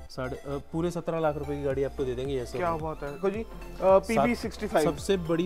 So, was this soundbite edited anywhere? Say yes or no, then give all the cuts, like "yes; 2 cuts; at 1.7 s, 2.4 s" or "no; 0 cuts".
yes; 1 cut; at 3.2 s